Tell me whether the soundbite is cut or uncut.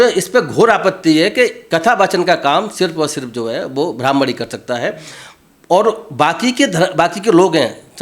uncut